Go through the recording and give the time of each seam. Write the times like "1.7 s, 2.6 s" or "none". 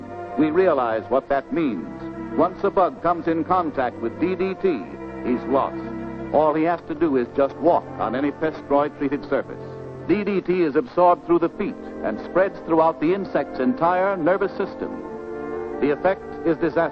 11.8 s